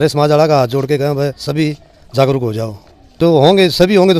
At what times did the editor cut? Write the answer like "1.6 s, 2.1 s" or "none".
3.2 s